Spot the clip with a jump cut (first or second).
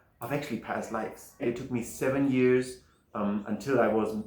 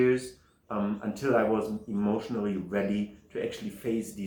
first